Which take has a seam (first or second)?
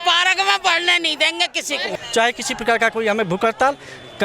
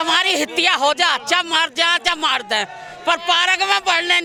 first